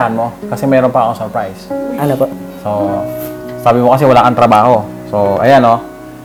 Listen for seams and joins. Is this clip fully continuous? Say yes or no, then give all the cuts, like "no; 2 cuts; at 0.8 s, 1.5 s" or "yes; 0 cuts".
yes; 0 cuts